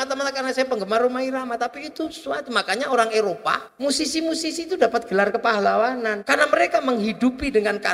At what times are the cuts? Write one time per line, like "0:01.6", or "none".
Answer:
0:03.7
0:06.2